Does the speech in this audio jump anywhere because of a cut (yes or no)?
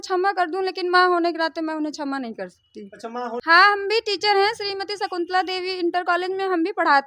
yes